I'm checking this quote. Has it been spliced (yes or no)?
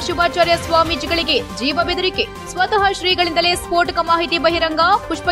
no